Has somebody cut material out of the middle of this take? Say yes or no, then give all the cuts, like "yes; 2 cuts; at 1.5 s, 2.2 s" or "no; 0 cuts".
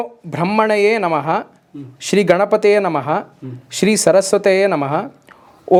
no; 0 cuts